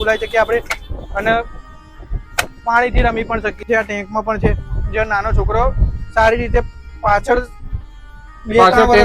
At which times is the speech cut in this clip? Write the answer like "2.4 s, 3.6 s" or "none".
3.6 s